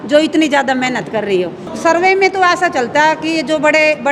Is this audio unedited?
no; 1 cut; at 1.7 s

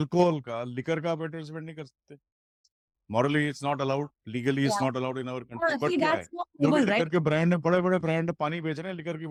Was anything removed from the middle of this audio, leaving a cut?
no; 0 cuts

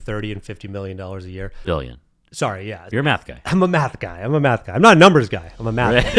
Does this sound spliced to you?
yes; 2 cuts; at 1.5 s, 2.9 s

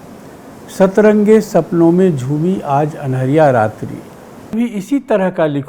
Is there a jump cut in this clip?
yes; 1 cut; at 4.5 s

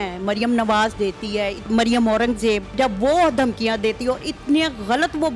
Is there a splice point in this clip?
yes; 2 cuts; at 1.7 s, 2.7 s

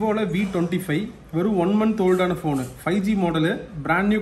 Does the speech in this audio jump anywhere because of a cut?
no; 0 cuts

